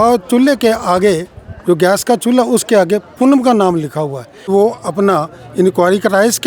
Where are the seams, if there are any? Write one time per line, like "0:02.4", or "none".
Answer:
0:04.5